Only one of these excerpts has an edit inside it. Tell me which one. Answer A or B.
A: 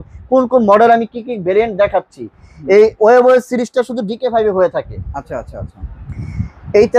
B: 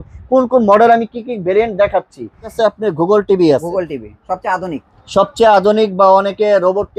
B